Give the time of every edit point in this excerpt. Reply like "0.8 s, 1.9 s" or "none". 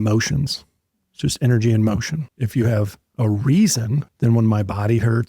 2.3 s, 4.0 s